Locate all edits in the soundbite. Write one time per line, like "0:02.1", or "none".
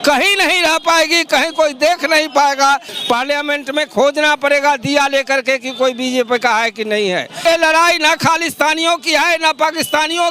0:02.8
0:07.4